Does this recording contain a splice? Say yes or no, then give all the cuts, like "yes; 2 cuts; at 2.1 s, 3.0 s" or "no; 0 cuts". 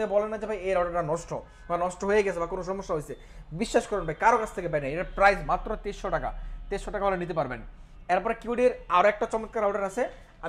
no; 0 cuts